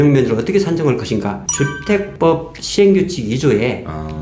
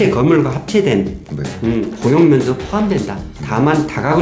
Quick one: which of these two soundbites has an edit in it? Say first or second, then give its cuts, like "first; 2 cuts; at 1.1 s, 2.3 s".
first; 1 cut; at 1.9 s